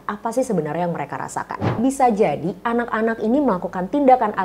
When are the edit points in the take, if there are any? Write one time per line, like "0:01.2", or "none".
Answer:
0:01.8

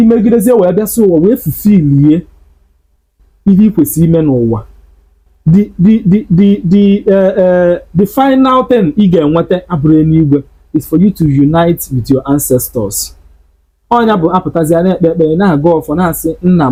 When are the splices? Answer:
none

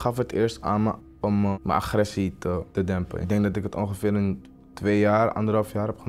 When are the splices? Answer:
0:01.5
0:02.9

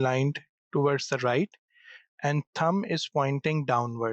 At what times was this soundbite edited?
none

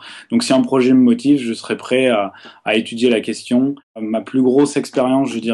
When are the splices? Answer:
0:03.9

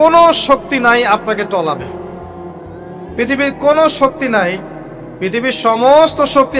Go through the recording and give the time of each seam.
none

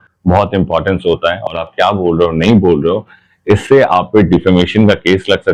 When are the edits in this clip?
none

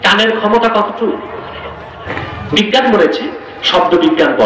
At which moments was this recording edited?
0:01.9

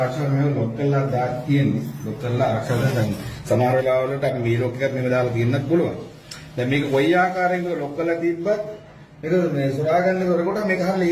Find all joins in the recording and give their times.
none

